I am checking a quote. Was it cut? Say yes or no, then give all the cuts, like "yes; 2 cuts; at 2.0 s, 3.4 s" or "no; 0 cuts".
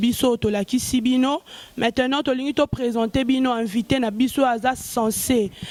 no; 0 cuts